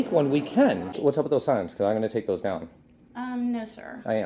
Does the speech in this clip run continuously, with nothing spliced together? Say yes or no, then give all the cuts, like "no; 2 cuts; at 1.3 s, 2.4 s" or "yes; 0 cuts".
no; 1 cut; at 0.9 s